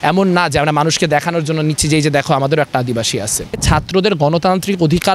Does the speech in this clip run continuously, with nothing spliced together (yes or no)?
no